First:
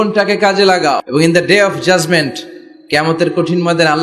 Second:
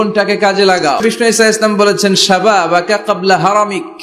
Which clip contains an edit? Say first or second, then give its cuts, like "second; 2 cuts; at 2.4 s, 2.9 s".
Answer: second; 1 cut; at 1.0 s